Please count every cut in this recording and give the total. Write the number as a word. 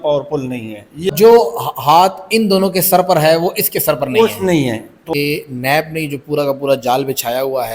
two